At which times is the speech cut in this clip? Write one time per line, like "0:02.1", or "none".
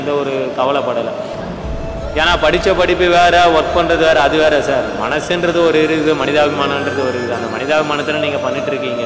none